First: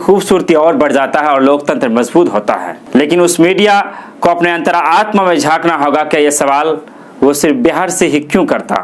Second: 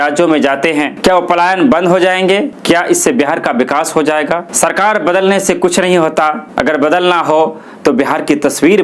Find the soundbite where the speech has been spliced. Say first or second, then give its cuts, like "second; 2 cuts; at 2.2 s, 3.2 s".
second; 2 cuts; at 0.9 s, 4.5 s